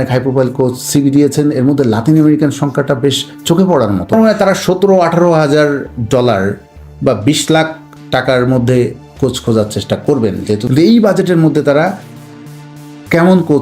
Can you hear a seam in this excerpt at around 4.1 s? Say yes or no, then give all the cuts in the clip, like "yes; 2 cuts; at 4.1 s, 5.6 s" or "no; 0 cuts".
yes; 2 cuts; at 4.1 s, 10.6 s